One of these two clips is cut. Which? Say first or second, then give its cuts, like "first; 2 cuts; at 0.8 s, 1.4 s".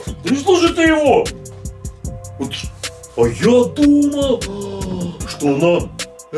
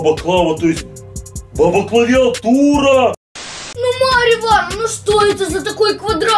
second; 1 cut; at 3.3 s